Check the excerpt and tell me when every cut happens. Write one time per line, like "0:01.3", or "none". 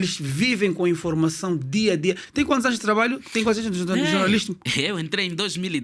none

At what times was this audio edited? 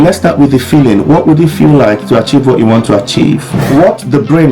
0:03.5

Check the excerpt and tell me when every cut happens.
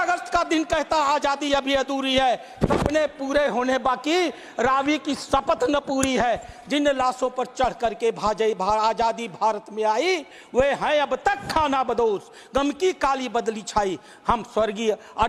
none

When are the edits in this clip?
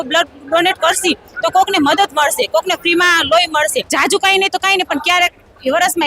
0:03.8

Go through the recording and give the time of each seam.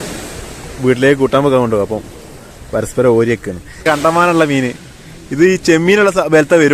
0:03.8

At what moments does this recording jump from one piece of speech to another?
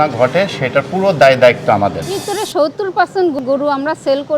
0:02.3
0:03.4

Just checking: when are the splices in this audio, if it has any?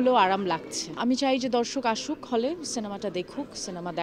0:01.0

